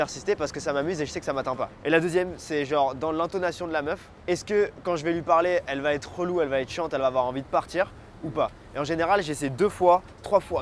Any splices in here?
no; 0 cuts

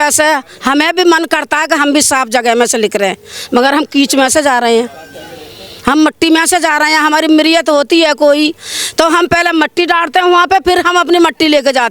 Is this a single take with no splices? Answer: yes; 0 cuts

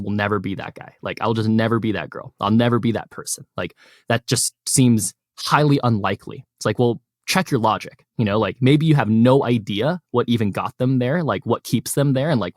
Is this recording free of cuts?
yes; 0 cuts

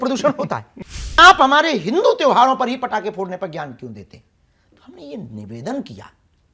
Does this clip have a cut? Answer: yes; 1 cut; at 1.2 s

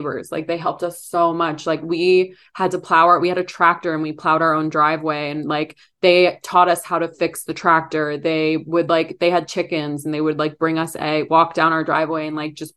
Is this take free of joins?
yes; 0 cuts

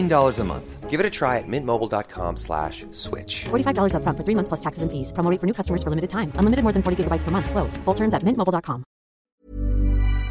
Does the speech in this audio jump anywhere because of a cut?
yes; 1 cut; at 9.2 s

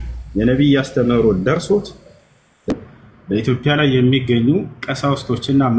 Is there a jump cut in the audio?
yes; 1 cut; at 2.7 s

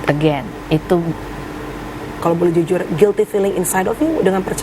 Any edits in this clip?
yes; 1 cut; at 2.1 s

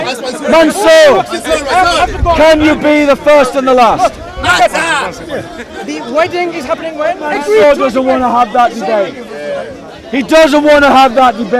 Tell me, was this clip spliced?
yes; 1 cut; at 7.2 s

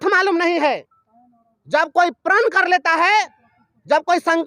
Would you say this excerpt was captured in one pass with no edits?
yes; 0 cuts

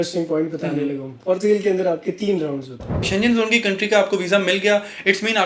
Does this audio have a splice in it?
yes; 1 cut; at 3.0 s

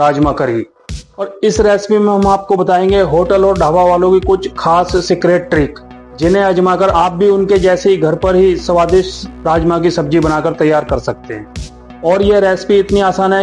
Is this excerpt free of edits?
yes; 0 cuts

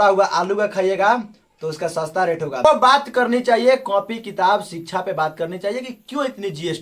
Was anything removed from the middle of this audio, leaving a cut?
yes; 1 cut; at 2.6 s

